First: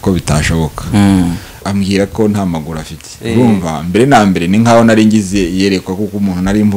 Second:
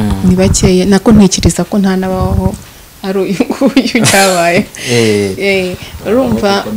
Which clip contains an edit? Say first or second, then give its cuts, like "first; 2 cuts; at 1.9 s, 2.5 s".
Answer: first; 1 cut; at 1.6 s